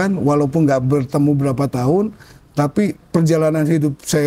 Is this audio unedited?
yes; 0 cuts

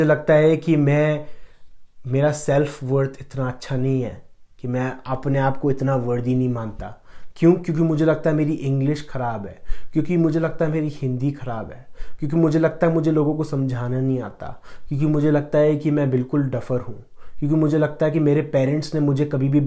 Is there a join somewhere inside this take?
no; 0 cuts

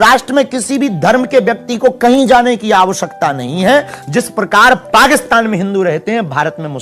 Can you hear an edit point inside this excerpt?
no; 0 cuts

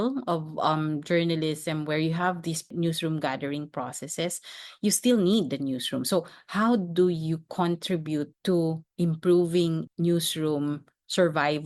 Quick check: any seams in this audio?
yes; 3 cuts; at 2.7 s, 8.3 s, 9.9 s

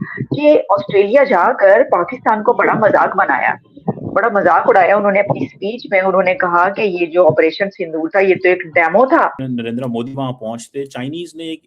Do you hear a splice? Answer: yes; 1 cut; at 9.4 s

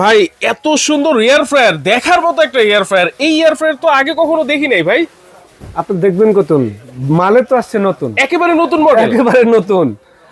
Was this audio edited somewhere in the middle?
no; 0 cuts

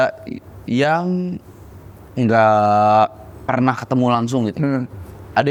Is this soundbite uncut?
yes; 0 cuts

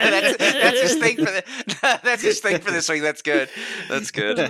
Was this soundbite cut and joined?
no; 0 cuts

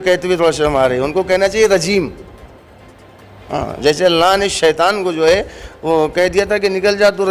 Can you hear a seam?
no; 0 cuts

